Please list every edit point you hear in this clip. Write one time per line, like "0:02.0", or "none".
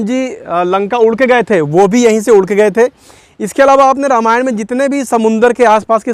none